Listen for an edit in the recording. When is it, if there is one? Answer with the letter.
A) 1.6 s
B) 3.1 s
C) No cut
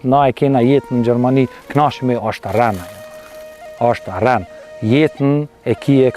C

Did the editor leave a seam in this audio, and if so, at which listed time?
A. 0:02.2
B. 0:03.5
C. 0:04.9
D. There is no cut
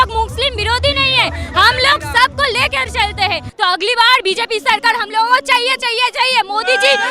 B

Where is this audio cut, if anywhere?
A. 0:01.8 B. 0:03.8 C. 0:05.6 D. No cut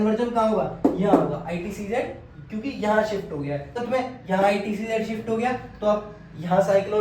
B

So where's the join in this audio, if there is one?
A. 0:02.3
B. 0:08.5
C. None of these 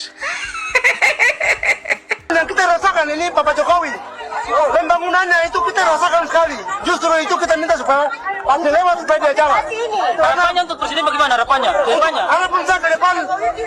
A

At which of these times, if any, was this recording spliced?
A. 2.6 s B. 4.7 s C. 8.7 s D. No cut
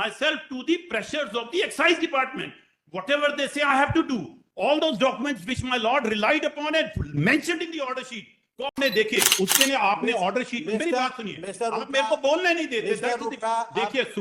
C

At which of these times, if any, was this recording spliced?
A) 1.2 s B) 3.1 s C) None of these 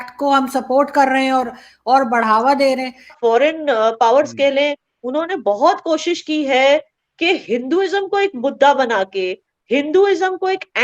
B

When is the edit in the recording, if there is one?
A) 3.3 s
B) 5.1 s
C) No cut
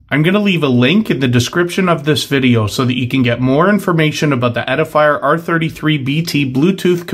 C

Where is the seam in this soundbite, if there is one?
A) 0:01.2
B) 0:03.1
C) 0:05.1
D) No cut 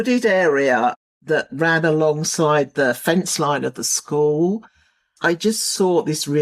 C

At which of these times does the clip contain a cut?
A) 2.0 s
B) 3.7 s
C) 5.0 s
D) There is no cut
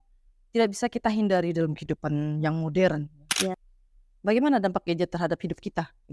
B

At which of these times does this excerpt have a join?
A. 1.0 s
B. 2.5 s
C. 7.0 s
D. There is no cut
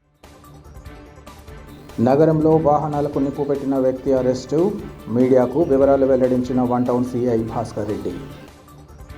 A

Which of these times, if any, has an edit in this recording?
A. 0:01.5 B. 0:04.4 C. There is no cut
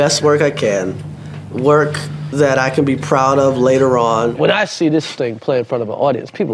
B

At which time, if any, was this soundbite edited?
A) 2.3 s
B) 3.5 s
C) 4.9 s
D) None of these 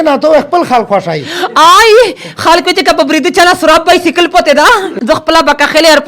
C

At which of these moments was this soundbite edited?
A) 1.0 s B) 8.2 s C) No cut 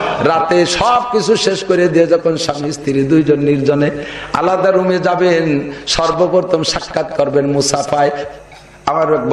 B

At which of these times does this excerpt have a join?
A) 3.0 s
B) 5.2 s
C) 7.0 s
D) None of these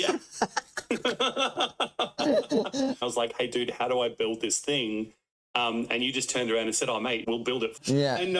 A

